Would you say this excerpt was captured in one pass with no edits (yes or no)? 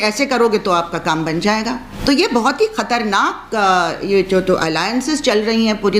no